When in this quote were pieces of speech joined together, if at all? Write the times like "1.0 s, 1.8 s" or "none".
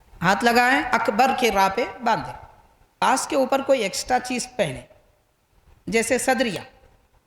3.0 s